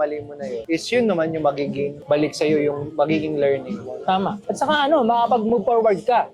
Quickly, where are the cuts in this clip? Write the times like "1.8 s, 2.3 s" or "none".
none